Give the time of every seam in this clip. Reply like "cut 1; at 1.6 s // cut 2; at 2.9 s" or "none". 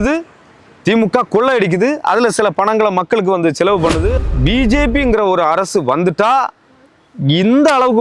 cut 1; at 4.1 s